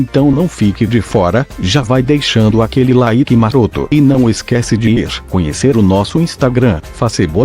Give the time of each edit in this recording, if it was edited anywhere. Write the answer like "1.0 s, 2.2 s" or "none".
1.0 s